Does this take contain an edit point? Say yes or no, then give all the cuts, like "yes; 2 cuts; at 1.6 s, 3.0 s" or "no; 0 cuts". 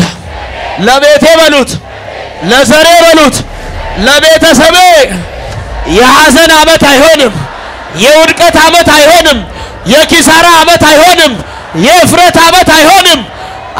no; 0 cuts